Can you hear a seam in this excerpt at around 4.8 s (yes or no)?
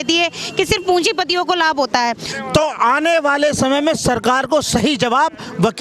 no